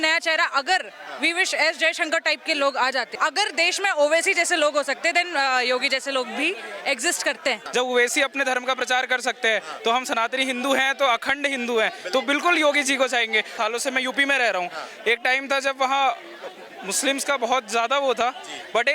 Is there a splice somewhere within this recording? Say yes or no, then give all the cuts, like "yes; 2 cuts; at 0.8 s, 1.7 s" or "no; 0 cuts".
yes; 3 cuts; at 3.1 s, 7.6 s, 13.5 s